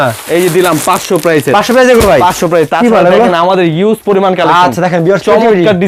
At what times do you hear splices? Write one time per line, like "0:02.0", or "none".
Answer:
none